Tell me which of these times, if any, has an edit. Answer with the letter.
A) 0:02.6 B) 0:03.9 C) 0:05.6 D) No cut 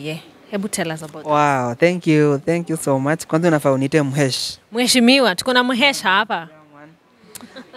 D